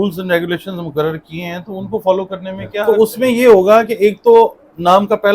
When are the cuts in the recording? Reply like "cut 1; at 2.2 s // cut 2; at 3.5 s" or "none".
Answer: cut 1; at 2.8 s

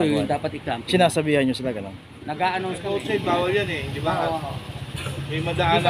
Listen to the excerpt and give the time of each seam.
cut 1; at 2.8 s

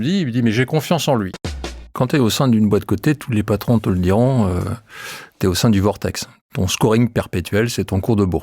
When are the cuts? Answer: cut 1; at 1.9 s // cut 2; at 6.3 s

